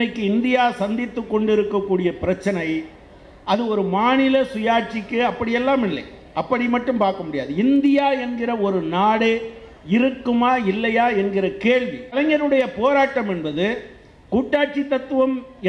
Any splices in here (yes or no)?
yes